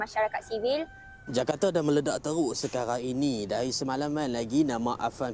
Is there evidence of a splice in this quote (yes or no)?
yes